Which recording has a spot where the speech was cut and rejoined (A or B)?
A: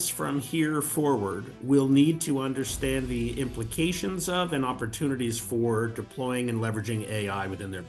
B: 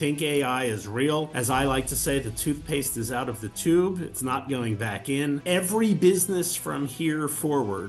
B